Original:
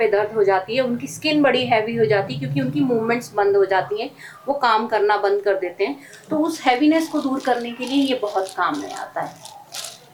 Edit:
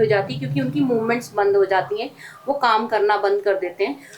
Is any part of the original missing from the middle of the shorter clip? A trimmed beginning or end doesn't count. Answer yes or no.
no